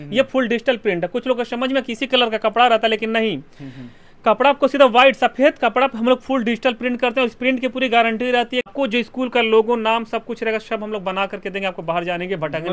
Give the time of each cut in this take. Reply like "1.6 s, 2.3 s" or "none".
8.7 s